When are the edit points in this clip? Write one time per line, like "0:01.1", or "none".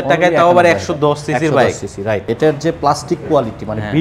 0:02.3